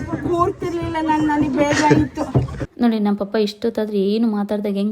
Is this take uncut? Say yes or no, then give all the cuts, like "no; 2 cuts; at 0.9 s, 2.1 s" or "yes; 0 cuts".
no; 1 cut; at 2.6 s